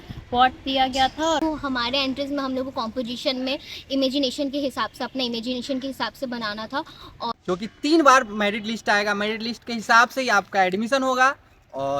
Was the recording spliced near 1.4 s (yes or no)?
yes